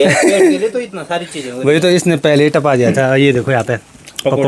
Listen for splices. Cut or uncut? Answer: uncut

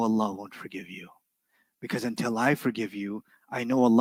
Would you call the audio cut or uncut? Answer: uncut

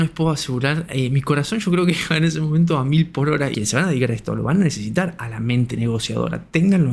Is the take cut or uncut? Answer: cut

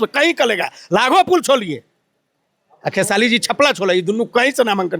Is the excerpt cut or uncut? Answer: uncut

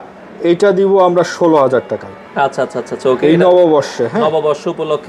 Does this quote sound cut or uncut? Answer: uncut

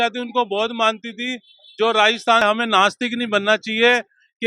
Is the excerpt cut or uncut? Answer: cut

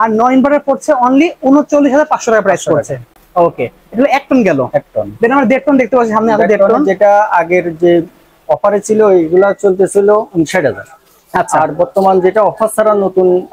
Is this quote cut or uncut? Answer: uncut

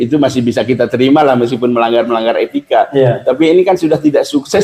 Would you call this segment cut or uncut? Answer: uncut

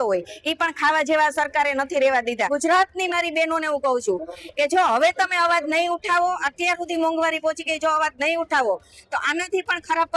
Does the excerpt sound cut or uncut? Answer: cut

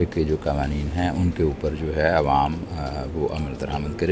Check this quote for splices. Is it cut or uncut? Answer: uncut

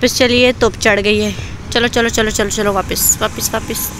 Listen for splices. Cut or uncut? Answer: uncut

